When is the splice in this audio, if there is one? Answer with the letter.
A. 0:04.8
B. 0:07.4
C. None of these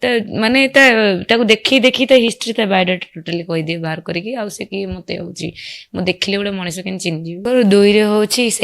B